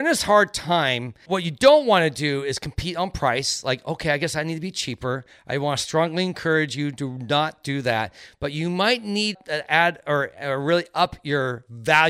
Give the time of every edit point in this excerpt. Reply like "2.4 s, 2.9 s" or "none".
none